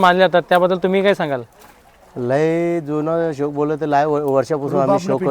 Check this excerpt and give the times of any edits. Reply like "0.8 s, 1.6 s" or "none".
none